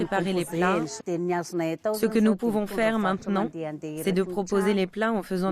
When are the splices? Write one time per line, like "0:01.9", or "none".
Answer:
0:00.9